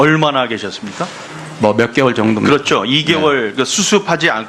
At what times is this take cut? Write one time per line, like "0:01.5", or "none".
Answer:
0:02.8